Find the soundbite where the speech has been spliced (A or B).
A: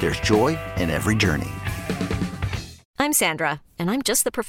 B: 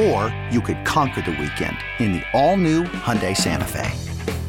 A